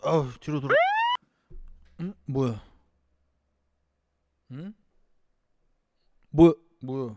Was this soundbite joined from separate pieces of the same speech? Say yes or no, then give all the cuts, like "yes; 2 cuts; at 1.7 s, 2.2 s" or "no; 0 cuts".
no; 0 cuts